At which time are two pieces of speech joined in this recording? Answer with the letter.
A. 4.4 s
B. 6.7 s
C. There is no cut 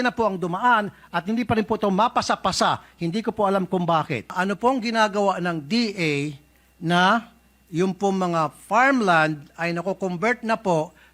A